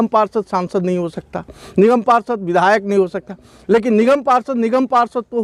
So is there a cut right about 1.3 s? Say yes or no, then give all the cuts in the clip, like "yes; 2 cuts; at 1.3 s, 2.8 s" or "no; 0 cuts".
no; 0 cuts